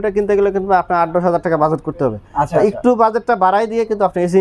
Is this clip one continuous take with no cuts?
yes; 0 cuts

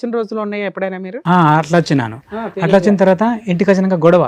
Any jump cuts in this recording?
no; 0 cuts

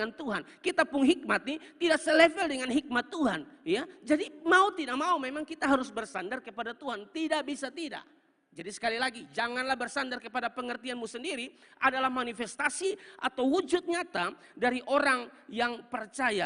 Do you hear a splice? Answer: no; 0 cuts

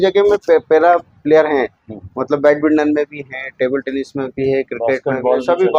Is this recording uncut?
yes; 0 cuts

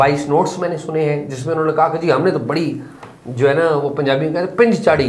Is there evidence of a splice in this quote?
no; 0 cuts

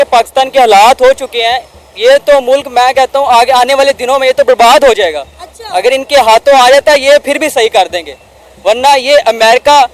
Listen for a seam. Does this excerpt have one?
no; 0 cuts

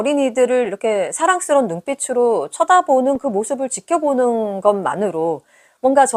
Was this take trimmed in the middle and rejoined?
no; 0 cuts

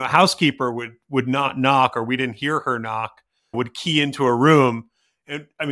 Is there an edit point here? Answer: yes; 1 cut; at 3.6 s

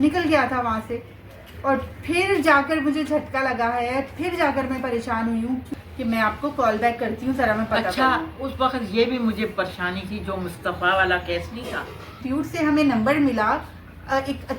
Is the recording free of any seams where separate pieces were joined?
no; 2 cuts; at 5.7 s, 12.1 s

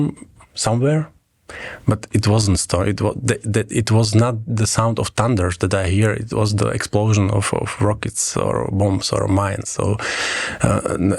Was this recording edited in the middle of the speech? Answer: no; 0 cuts

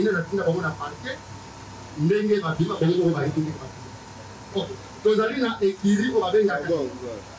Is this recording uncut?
yes; 0 cuts

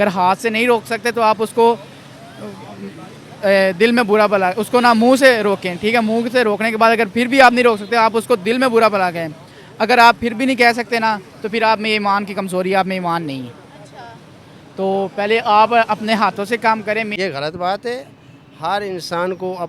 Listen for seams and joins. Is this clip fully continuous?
no; 1 cut; at 17.1 s

